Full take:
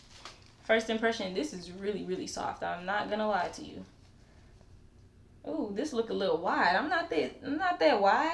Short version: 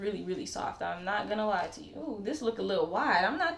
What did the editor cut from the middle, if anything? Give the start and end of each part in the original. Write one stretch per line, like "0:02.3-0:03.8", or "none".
0:03.7-0:05.4